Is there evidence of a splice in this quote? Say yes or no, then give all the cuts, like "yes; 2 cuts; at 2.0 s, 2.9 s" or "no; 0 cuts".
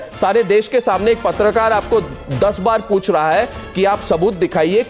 no; 0 cuts